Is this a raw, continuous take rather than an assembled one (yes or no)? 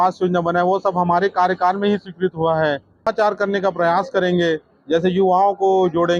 no